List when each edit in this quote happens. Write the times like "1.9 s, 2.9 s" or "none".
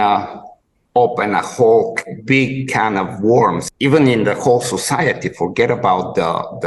3.7 s